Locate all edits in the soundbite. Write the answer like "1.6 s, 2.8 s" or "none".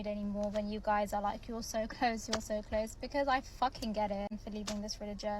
4.3 s